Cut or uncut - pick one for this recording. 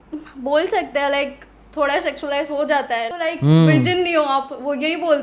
cut